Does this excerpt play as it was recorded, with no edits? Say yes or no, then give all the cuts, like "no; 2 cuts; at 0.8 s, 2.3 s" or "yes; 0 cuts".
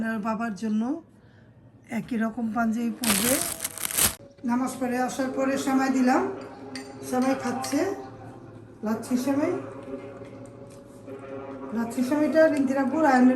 no; 1 cut; at 4.2 s